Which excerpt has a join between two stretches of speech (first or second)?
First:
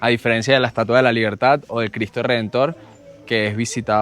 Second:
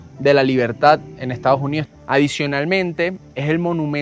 second